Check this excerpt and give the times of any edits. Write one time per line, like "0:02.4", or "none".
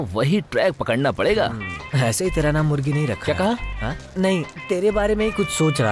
none